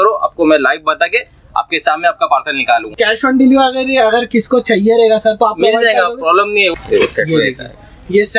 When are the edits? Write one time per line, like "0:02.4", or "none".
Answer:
0:02.9
0:06.7